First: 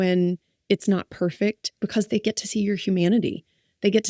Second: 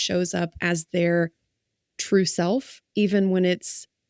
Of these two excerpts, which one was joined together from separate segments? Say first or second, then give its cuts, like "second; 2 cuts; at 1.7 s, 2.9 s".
first; 1 cut; at 1.8 s